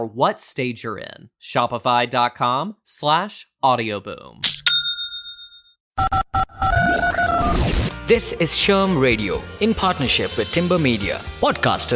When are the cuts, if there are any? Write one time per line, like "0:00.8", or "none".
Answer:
0:06.0